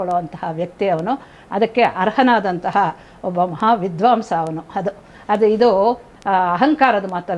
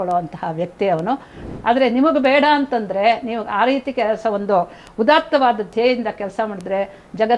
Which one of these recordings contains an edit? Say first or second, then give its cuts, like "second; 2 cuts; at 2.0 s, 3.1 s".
second; 1 cut; at 1.4 s